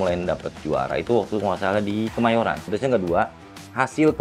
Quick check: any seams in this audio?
yes; 1 cut; at 2.6 s

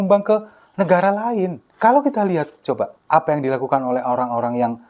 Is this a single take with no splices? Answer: no; 2 cuts; at 1.6 s, 3.0 s

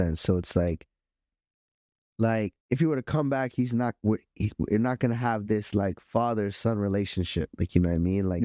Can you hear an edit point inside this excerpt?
no; 0 cuts

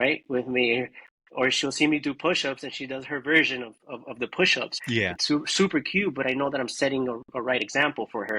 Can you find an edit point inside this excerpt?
yes; 1 cut; at 4.8 s

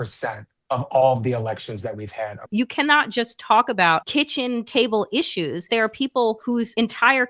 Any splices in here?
yes; 4 cuts; at 2.5 s, 4.1 s, 5.6 s, 6.5 s

